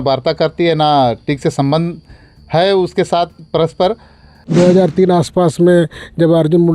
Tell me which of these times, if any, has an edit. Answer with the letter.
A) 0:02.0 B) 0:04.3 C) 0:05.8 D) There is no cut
B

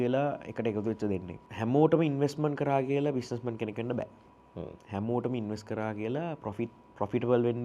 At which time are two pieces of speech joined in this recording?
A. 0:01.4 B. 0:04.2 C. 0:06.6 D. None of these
A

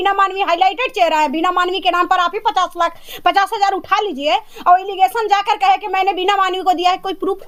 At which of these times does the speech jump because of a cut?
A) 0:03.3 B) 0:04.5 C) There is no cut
C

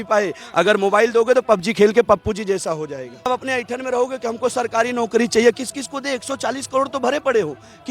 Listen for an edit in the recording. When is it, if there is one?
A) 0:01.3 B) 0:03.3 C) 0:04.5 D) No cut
B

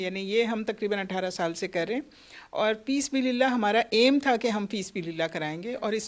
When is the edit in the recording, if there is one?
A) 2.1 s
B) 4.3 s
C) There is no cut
C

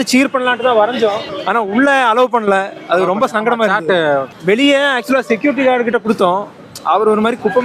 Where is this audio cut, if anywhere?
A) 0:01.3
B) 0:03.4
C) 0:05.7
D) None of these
A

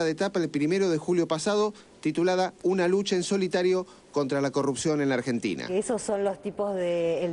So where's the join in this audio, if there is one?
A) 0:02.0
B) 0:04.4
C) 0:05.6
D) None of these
C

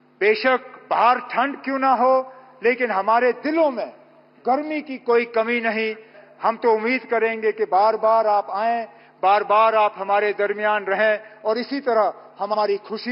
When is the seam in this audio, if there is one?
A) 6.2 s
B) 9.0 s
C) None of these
A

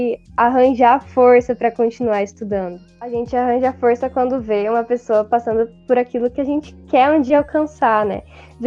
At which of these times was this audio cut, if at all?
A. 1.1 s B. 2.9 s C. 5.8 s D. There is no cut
B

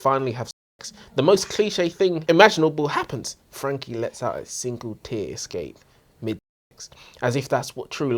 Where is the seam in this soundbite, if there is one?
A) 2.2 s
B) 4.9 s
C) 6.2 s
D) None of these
A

